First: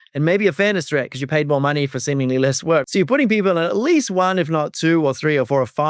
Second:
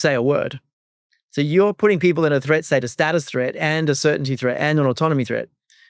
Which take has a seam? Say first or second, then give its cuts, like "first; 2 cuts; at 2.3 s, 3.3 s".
first; 1 cut; at 2.9 s